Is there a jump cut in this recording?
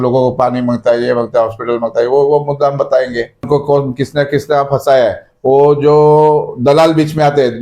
yes; 1 cut; at 3.4 s

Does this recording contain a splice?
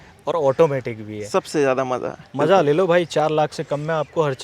yes; 1 cut; at 2.2 s

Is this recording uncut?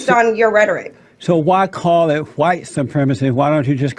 yes; 0 cuts

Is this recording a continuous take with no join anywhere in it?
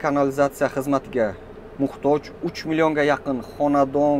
yes; 0 cuts

